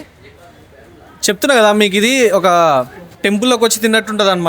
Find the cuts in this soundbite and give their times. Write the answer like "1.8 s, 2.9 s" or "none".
3.0 s